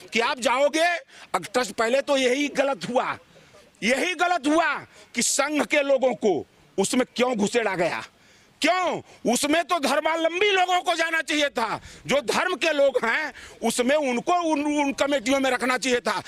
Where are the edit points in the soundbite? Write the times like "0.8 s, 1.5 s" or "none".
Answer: none